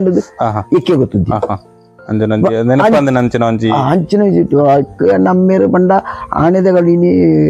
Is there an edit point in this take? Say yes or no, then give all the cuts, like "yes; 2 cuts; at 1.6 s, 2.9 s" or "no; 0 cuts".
no; 0 cuts